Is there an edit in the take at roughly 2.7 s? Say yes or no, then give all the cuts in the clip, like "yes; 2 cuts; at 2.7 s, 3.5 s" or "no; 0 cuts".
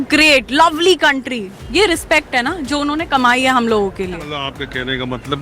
no; 1 cut; at 4.2 s